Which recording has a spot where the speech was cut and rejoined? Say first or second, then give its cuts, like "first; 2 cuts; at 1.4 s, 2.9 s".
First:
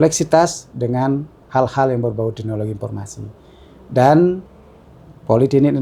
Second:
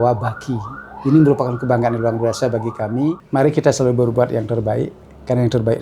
second; 1 cut; at 3.2 s